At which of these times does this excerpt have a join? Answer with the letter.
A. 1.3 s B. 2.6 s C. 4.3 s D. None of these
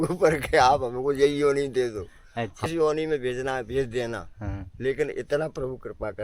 B